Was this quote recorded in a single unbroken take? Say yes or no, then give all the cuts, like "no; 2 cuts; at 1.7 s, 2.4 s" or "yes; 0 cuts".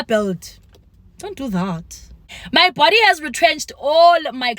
no; 1 cut; at 2.2 s